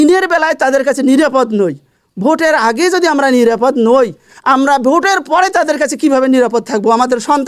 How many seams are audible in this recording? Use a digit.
0